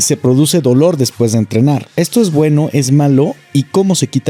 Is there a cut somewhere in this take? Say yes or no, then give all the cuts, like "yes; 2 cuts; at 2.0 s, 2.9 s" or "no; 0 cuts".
no; 0 cuts